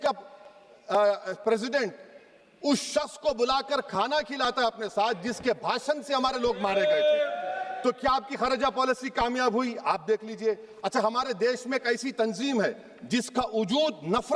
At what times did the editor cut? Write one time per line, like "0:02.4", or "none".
none